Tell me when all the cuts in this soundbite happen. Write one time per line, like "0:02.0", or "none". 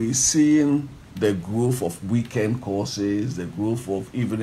0:01.0